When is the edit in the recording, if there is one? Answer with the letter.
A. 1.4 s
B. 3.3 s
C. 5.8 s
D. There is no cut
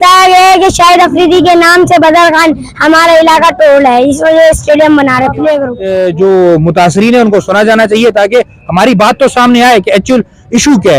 C